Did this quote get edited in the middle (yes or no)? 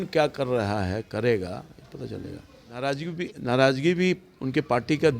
yes